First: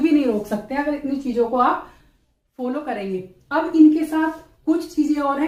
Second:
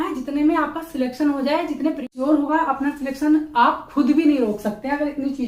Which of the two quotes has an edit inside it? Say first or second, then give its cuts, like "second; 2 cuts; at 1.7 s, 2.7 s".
second; 1 cut; at 2.1 s